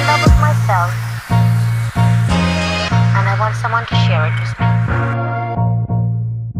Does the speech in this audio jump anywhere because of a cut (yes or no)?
no